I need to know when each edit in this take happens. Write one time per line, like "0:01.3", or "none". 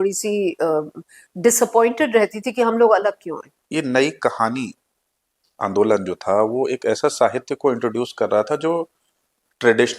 0:03.5

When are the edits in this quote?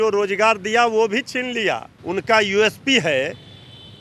0:01.9

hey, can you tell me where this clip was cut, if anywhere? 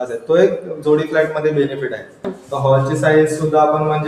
0:02.4

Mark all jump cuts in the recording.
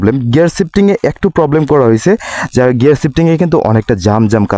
none

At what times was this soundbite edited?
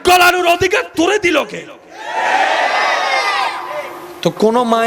none

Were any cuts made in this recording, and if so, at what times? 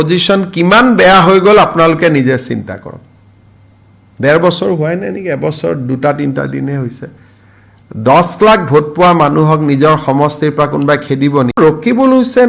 0:11.6

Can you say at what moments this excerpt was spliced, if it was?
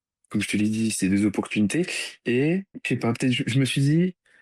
0:02.7

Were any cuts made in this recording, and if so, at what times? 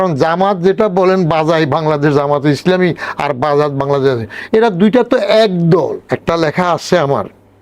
0:06.0

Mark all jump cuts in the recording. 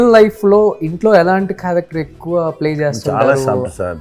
none

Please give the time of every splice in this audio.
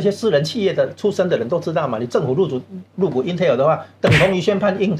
none

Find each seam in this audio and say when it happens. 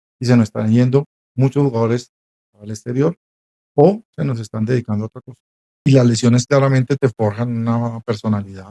0:05.8

